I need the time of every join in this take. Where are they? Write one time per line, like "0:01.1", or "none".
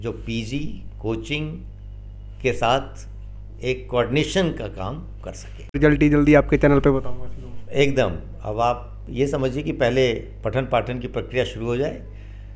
0:05.8